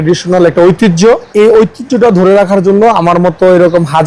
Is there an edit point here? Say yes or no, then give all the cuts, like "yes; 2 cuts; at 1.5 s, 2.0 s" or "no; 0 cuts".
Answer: yes; 1 cut; at 1.3 s